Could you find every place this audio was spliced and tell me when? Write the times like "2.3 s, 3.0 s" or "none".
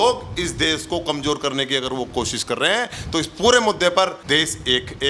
4.2 s